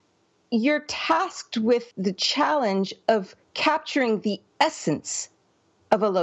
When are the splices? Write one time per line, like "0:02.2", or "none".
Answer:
0:01.9